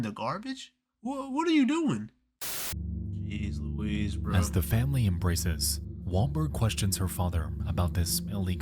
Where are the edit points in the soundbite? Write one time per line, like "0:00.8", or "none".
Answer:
0:02.4